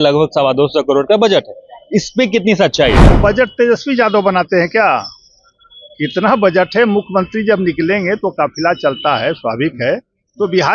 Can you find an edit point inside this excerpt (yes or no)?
yes